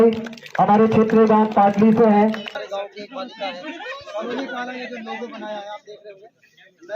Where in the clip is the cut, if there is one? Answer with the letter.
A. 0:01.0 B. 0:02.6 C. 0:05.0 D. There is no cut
B